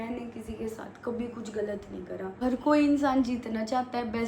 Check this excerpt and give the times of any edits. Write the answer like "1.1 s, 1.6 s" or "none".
2.4 s